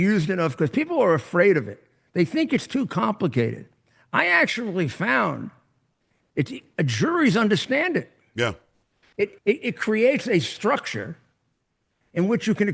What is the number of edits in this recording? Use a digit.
0